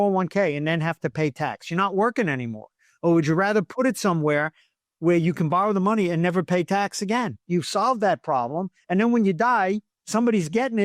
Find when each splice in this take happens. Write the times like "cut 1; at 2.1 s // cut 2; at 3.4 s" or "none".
cut 1; at 7.4 s // cut 2; at 9.9 s